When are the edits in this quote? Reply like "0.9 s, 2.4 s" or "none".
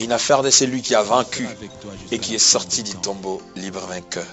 none